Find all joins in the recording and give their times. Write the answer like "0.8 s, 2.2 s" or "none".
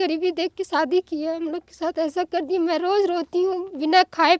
none